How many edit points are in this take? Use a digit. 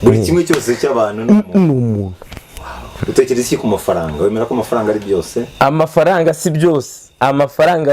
1